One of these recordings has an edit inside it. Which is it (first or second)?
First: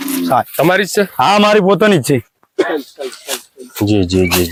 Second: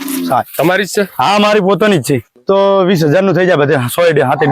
second